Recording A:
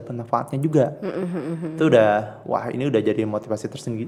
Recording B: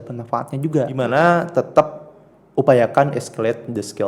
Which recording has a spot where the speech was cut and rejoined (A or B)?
B